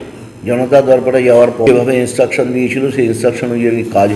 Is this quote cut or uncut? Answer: cut